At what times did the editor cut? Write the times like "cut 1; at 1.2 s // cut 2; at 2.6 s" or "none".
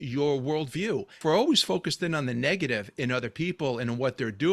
cut 1; at 1.2 s